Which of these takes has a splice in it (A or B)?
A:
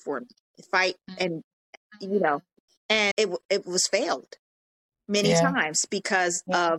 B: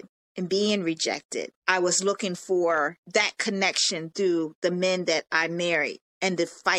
B